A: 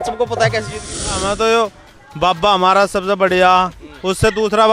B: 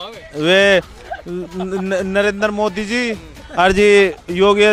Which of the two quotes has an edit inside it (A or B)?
A